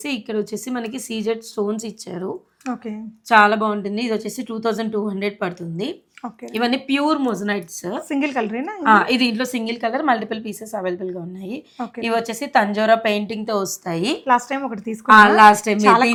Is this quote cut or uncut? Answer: uncut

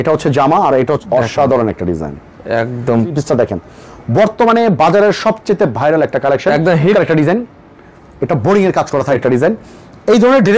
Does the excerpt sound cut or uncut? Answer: cut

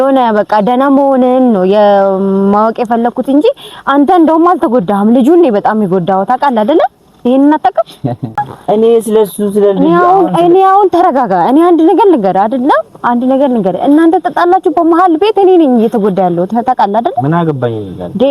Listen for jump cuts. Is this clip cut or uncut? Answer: cut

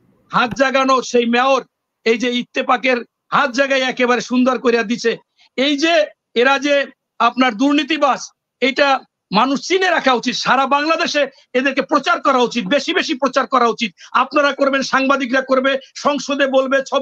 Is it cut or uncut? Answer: uncut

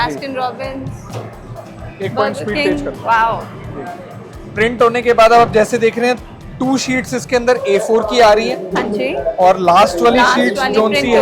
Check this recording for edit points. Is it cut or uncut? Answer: uncut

